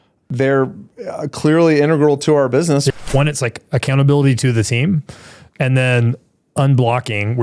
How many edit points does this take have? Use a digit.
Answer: 1